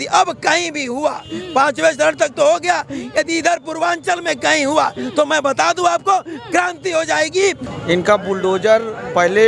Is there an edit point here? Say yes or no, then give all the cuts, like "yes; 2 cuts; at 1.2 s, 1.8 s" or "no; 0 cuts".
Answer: yes; 1 cut; at 7.6 s